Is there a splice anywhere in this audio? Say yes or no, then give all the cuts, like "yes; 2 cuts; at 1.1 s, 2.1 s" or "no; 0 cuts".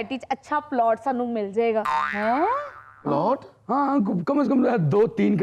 no; 0 cuts